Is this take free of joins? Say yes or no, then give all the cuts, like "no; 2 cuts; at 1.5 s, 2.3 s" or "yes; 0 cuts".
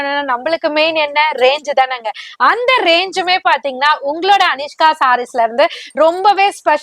yes; 0 cuts